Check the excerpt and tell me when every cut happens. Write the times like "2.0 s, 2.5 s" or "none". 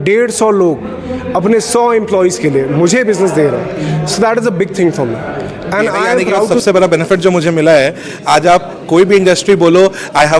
6.1 s